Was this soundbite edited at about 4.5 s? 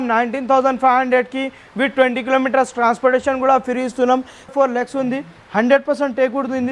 yes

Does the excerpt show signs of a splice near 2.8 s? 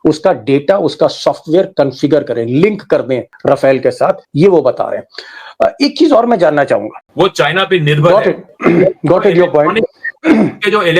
no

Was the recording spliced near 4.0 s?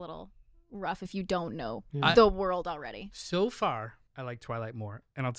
yes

